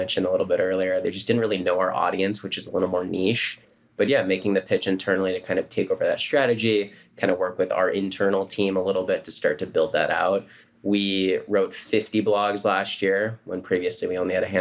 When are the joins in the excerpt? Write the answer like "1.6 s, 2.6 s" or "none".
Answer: 3.8 s

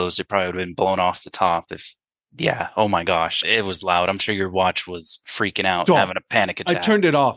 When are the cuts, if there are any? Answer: 3.4 s

